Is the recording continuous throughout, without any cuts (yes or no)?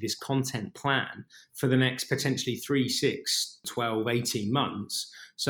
no